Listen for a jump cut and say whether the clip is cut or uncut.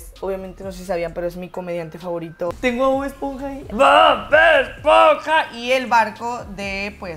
cut